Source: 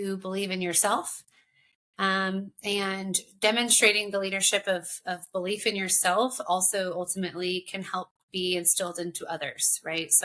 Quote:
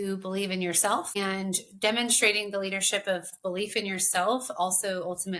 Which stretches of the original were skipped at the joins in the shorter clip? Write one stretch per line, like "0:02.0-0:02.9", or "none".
0:01.1-0:02.7
0:04.9-0:05.2